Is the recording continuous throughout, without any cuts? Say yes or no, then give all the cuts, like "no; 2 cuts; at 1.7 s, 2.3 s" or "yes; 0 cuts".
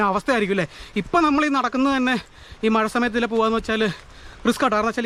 yes; 0 cuts